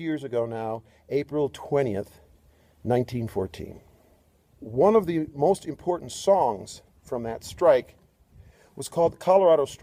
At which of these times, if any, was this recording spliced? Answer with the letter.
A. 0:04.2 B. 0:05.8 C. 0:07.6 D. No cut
D